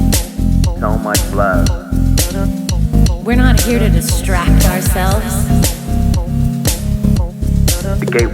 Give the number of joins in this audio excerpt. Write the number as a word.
one